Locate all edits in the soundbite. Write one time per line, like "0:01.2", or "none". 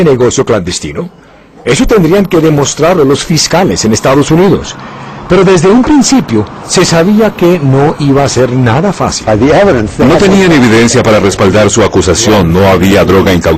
none